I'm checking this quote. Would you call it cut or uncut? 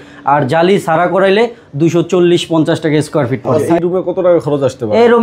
cut